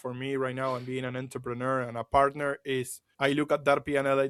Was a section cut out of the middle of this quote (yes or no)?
no